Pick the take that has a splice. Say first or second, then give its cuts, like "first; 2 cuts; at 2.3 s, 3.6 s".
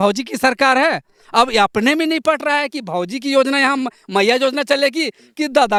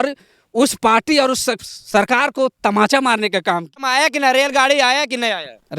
second; 1 cut; at 3.9 s